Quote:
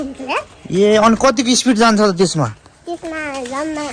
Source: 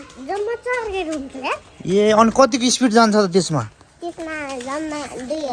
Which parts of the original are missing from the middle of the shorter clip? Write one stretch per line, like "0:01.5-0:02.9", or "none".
none